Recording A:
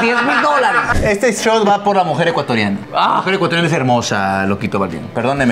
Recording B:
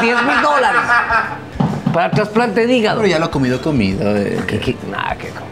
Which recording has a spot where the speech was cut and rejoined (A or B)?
A